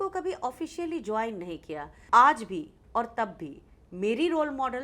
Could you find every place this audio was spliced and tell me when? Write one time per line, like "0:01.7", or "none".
0:01.9